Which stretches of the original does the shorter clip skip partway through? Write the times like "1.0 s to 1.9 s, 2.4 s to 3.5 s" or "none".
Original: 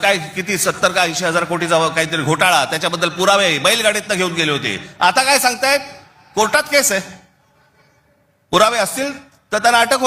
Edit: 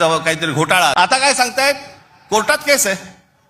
2.6 s to 5.0 s